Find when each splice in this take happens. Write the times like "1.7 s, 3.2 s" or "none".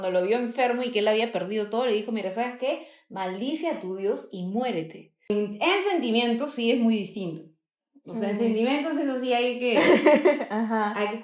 5.3 s